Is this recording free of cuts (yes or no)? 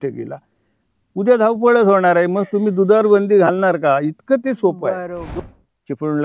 no